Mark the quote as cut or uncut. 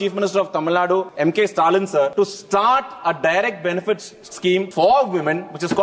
cut